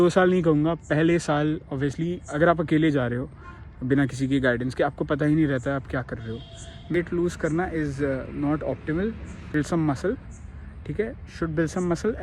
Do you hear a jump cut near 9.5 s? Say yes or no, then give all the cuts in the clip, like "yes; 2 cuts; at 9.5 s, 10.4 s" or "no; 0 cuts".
yes; 2 cuts; at 6.9 s, 9.5 s